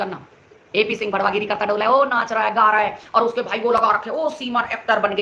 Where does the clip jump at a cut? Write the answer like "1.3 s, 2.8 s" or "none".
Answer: none